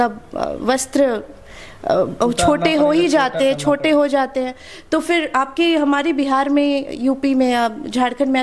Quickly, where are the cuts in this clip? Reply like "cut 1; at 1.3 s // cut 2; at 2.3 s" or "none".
none

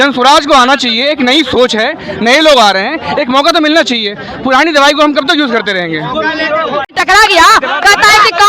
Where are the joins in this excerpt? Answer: cut 1; at 6.9 s

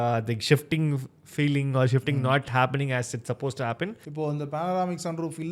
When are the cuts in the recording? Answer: cut 1; at 4.0 s

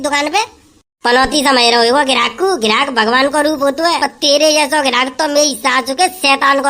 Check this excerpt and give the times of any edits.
cut 1; at 4.1 s

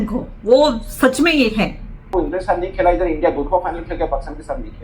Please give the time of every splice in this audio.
cut 1; at 2.1 s

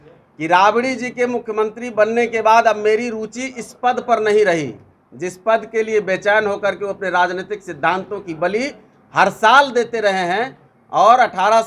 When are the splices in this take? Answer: none

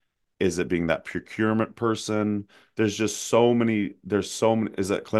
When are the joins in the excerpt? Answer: none

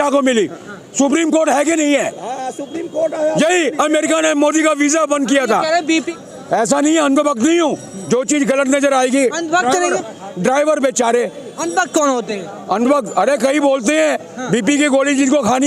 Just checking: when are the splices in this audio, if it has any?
cut 1; at 6.1 s

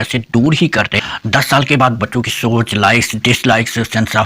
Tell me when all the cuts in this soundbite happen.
cut 1; at 0.9 s

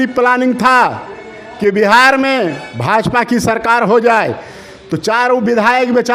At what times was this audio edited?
none

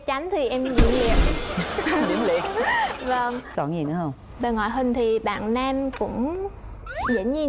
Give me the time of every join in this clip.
cut 1; at 3.6 s

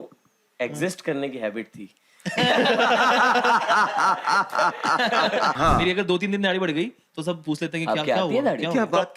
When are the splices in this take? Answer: cut 1; at 5.5 s

